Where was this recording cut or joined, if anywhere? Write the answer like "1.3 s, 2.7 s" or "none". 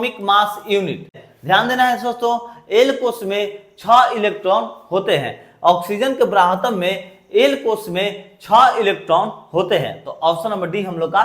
1.2 s